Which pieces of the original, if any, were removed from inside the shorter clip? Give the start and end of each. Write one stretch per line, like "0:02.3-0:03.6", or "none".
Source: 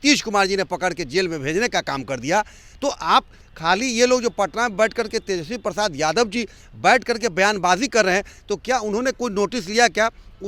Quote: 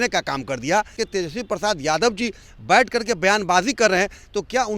0:02.6-0:05.1